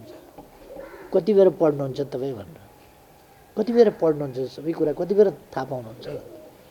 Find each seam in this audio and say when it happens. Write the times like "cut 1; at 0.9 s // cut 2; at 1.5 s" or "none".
none